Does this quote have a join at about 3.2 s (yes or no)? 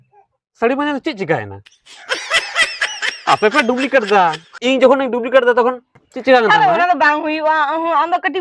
no